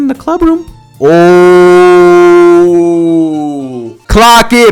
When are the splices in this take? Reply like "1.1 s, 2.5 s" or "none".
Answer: none